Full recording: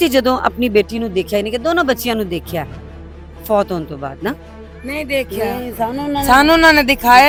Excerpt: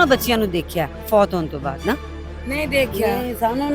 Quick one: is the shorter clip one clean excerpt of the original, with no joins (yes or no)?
no